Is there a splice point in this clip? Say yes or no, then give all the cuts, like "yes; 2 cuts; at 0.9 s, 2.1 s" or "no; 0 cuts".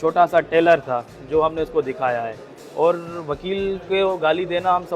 no; 0 cuts